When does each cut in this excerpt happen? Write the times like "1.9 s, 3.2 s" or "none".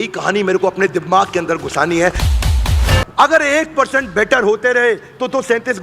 2.5 s